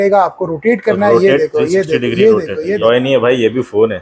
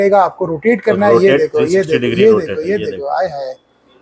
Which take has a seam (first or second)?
first